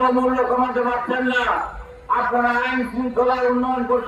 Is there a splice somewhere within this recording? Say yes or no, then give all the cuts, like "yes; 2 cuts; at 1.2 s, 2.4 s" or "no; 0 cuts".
no; 0 cuts